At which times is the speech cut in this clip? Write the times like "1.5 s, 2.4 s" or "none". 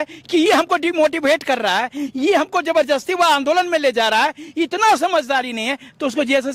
none